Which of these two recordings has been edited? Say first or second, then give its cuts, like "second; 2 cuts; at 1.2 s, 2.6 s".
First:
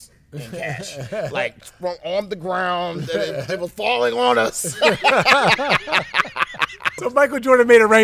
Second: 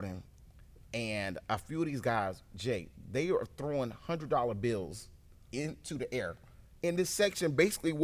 first; 1 cut; at 7.0 s